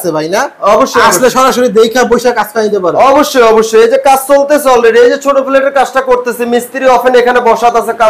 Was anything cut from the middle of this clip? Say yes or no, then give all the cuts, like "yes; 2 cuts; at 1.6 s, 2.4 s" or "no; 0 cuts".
no; 0 cuts